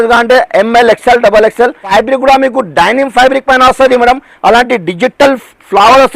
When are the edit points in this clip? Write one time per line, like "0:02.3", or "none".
0:01.9